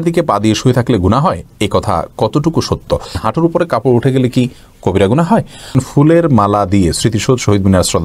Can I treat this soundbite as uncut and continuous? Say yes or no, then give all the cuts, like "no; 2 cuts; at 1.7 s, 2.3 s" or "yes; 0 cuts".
no; 2 cuts; at 3.2 s, 5.8 s